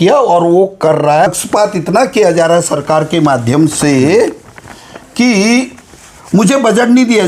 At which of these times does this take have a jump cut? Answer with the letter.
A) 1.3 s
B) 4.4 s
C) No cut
A